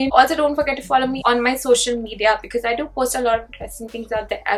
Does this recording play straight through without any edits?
yes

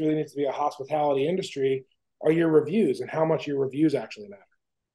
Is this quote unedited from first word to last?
yes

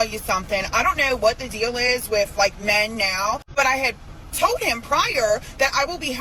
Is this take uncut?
yes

